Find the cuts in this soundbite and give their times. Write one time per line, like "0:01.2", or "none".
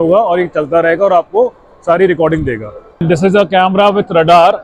0:03.0